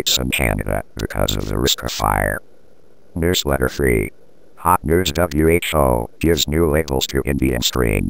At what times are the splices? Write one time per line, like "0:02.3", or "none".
0:03.1